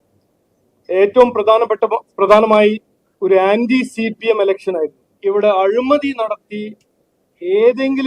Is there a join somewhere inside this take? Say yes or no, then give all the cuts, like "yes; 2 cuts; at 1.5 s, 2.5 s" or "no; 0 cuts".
yes; 1 cut; at 5.0 s